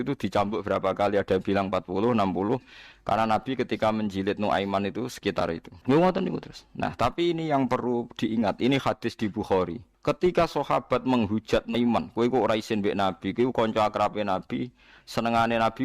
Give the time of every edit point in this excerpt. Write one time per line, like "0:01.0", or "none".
0:05.7
0:09.9